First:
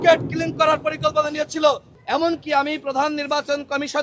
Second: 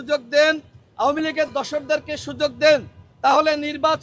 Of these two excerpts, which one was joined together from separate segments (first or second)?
first